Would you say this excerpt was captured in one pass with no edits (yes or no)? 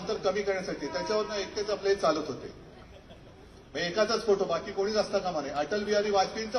yes